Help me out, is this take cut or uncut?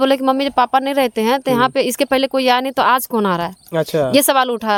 uncut